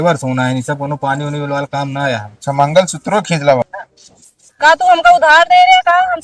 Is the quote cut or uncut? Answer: cut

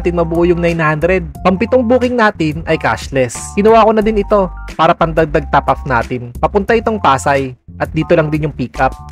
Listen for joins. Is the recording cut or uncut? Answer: uncut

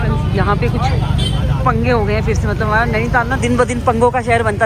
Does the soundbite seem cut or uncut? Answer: uncut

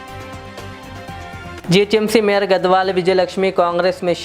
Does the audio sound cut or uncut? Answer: cut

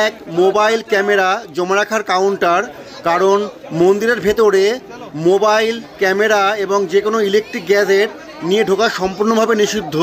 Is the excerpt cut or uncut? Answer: uncut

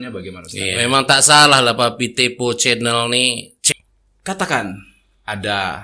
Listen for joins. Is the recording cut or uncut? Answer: cut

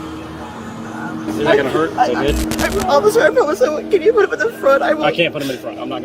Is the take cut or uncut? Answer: cut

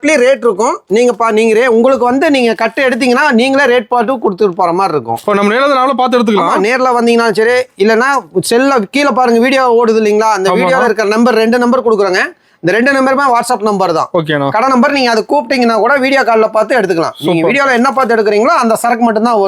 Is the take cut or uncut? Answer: uncut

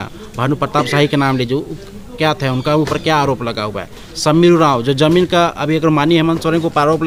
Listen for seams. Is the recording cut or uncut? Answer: uncut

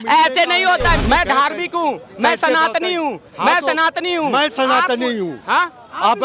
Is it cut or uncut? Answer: cut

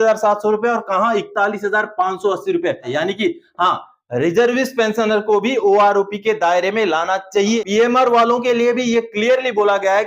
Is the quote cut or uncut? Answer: cut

